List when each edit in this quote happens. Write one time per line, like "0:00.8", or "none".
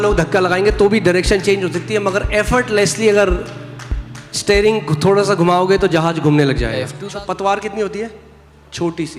0:07.0